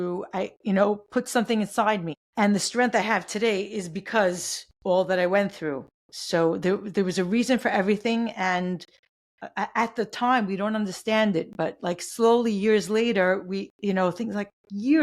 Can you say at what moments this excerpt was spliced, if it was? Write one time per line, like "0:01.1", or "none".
0:02.2